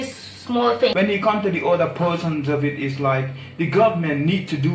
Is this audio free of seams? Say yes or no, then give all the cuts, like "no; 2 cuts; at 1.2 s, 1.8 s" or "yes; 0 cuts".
no; 1 cut; at 0.9 s